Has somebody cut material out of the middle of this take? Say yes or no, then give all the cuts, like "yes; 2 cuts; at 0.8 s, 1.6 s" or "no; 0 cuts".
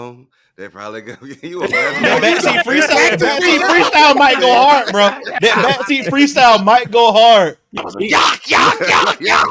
yes; 1 cut; at 7.8 s